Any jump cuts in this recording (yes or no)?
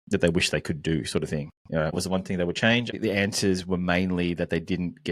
yes